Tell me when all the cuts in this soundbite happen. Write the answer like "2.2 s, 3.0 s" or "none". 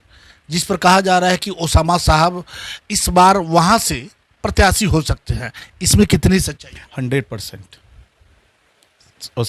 none